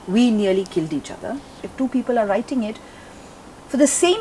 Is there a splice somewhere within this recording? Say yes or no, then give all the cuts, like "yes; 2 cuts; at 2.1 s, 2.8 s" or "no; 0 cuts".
yes; 1 cut; at 1.6 s